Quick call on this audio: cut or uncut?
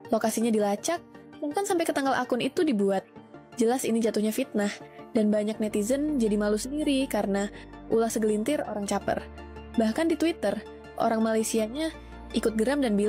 uncut